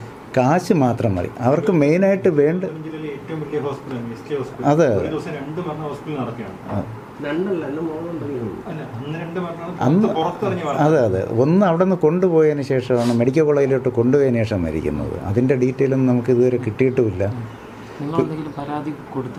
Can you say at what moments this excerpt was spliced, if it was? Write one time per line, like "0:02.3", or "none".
none